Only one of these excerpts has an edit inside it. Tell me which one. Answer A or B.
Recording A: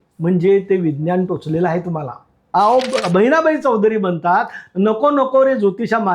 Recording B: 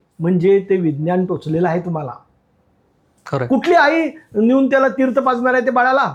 A